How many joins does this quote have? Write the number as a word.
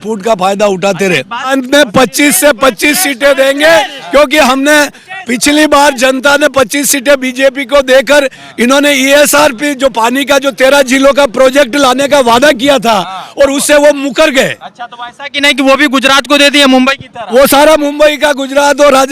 one